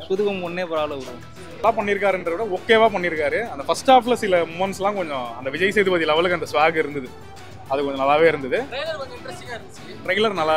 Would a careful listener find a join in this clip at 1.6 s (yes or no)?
yes